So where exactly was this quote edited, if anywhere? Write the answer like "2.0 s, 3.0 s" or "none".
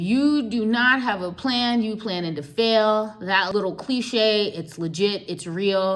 3.5 s